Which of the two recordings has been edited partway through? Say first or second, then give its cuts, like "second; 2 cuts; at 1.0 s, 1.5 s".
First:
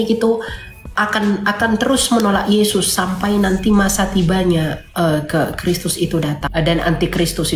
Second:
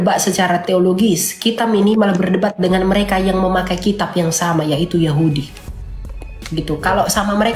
first; 1 cut; at 6.4 s